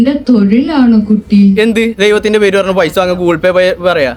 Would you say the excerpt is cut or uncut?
uncut